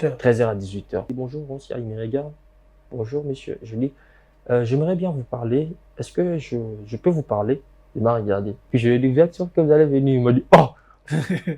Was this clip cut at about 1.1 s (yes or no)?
yes